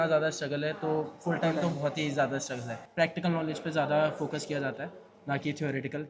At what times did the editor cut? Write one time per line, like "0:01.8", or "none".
0:02.8